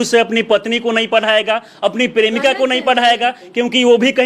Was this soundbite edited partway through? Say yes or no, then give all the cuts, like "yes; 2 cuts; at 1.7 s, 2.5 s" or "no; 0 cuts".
no; 0 cuts